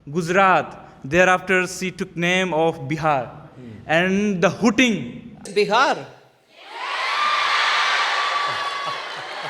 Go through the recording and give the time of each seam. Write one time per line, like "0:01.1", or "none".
none